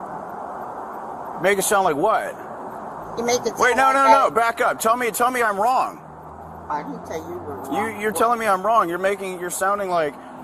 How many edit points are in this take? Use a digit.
1